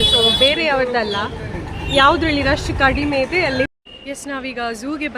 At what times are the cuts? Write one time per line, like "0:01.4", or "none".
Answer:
0:03.7

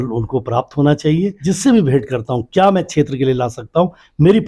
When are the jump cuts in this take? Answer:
0:01.4

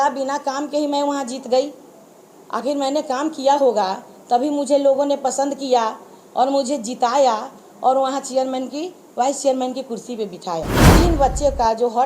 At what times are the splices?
0:10.9

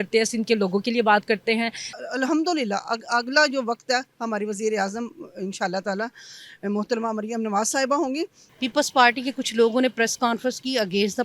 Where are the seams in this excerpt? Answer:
0:01.9
0:08.4

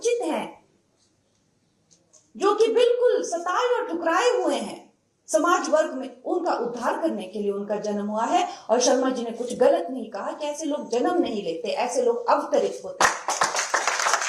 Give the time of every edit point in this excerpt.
none

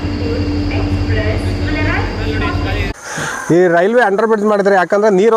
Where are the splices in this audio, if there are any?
0:03.0

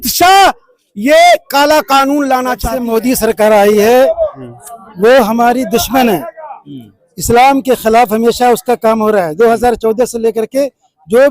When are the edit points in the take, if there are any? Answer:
0:02.7

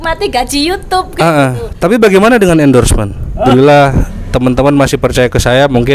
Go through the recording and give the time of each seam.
0:03.4

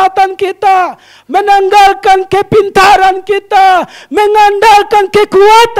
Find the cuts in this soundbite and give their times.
none

